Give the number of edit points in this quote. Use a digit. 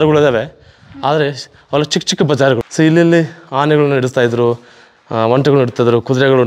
1